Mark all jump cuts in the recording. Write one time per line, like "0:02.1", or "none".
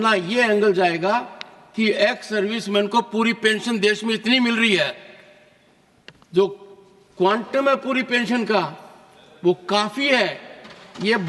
none